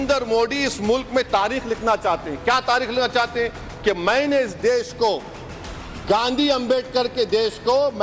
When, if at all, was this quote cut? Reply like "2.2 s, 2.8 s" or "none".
4.1 s

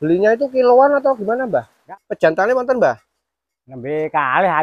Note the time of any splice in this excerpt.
1.8 s

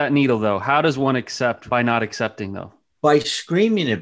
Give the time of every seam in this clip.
1.7 s

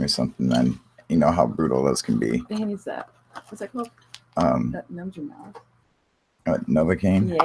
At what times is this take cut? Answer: 4.2 s

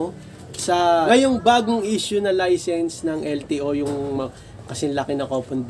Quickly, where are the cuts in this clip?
1.1 s

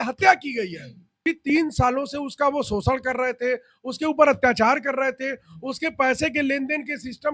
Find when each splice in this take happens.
1.1 s

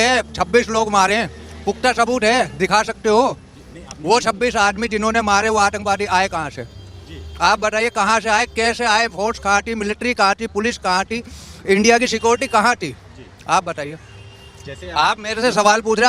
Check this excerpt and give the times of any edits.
none

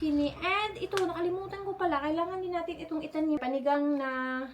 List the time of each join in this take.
3.4 s

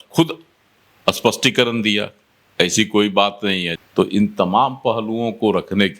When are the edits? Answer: 3.7 s

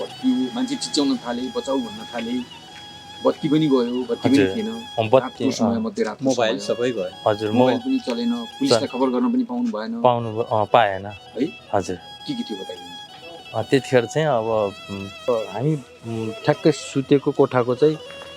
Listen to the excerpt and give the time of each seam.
15.3 s

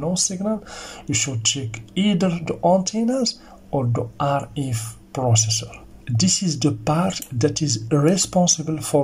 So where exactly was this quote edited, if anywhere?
6.0 s

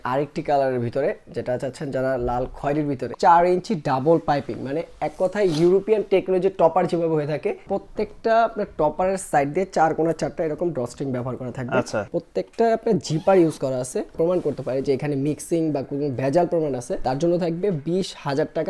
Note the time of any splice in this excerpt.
3.1 s, 7.6 s, 12.1 s, 14.1 s, 16.9 s

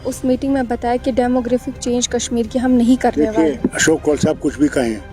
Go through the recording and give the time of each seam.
3.8 s

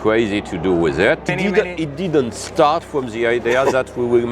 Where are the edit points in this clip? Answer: 1.3 s

